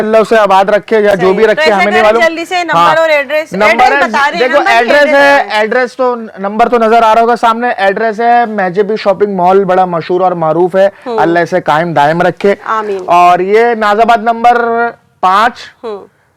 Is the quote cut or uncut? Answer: uncut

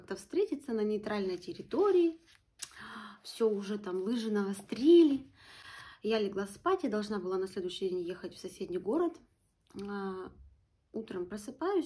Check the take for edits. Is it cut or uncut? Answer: uncut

